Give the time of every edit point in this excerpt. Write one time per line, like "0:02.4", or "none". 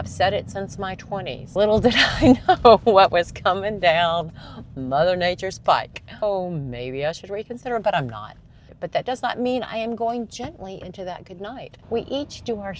0:01.4
0:06.2
0:08.7
0:11.7